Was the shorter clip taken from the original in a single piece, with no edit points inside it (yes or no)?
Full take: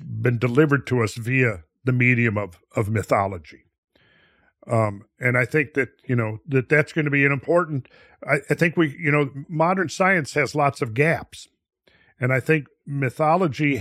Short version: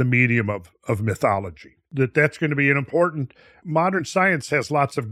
no